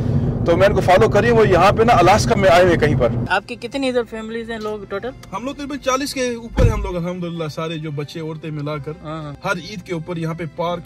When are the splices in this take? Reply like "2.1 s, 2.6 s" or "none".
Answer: 3.2 s, 9.3 s